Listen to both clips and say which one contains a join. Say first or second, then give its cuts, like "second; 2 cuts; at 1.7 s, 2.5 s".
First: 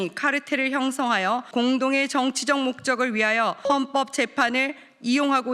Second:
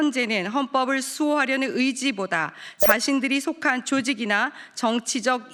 first; 2 cuts; at 1.5 s, 3.6 s